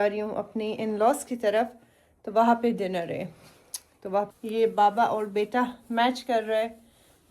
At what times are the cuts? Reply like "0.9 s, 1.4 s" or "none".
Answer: 4.3 s